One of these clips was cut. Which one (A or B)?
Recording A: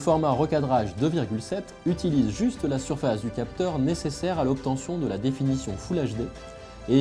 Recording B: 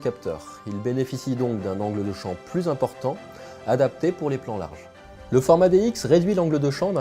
B